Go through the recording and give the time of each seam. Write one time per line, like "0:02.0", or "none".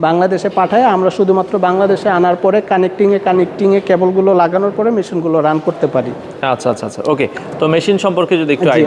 none